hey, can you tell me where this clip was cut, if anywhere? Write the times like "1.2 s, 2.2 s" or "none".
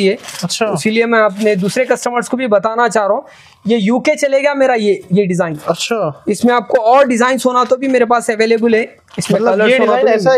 none